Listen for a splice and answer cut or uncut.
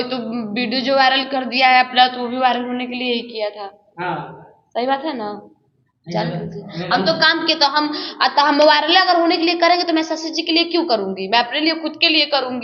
uncut